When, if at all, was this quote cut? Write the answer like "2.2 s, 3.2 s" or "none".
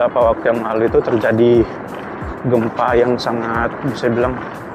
none